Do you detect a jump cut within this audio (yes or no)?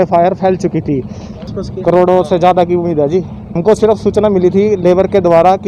yes